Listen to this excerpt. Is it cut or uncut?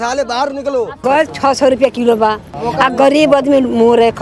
cut